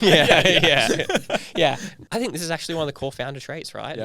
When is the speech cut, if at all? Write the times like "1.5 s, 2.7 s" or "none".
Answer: 2.0 s